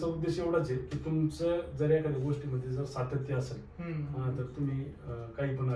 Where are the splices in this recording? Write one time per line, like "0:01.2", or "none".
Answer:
none